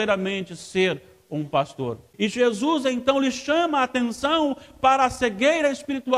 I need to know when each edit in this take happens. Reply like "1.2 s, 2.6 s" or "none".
4.6 s